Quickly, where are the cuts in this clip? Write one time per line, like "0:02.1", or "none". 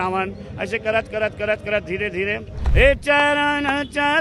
0:02.5